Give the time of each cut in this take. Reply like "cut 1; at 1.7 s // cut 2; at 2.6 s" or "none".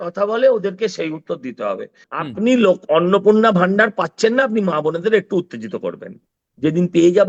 cut 1; at 2.0 s

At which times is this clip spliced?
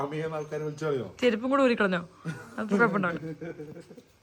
none

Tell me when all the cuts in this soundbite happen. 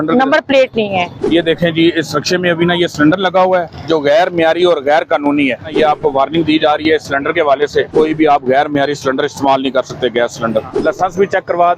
cut 1; at 1.2 s // cut 2; at 5.7 s // cut 3; at 7.9 s // cut 4; at 10.7 s

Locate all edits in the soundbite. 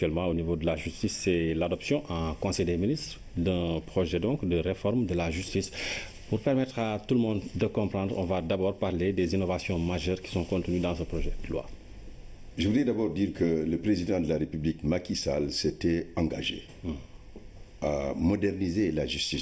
none

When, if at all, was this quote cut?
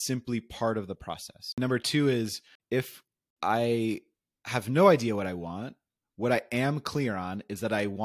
cut 1; at 1.5 s // cut 2; at 2.9 s

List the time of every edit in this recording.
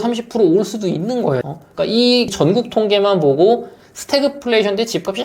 cut 1; at 1.4 s

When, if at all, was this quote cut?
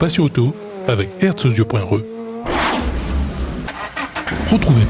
cut 1; at 3.7 s

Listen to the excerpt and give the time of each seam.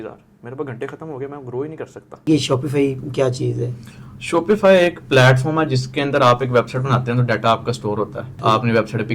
cut 1; at 2.3 s // cut 2; at 8.4 s

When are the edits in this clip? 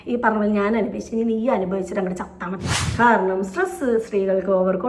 cut 1; at 2.8 s

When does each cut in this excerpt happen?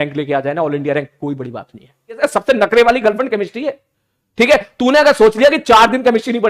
cut 1; at 2.2 s

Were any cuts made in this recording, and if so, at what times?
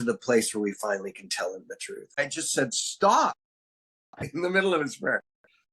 cut 1; at 2.1 s

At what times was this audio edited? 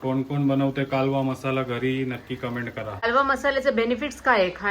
cut 1; at 3.1 s

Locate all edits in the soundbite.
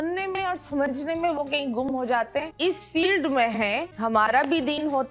cut 1; at 2.5 s

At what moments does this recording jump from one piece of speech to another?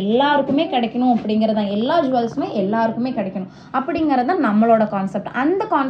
none

